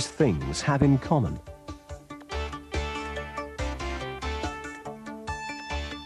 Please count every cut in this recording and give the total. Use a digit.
1